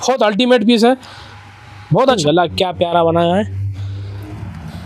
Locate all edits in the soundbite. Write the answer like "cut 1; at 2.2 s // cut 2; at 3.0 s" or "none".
cut 1; at 2.2 s